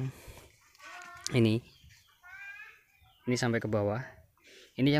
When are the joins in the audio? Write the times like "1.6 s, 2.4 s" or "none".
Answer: none